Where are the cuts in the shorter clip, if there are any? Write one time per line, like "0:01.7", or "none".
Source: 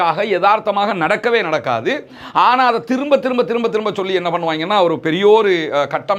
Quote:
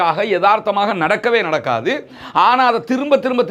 none